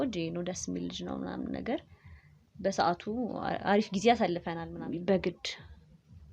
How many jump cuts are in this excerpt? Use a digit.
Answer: 1